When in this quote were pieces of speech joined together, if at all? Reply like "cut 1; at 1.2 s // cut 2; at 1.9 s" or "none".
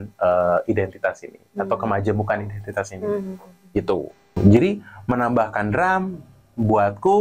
cut 1; at 4.3 s